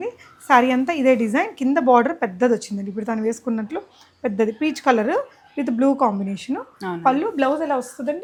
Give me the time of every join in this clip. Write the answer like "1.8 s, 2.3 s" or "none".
none